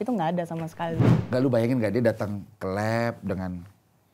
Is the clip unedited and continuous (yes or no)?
no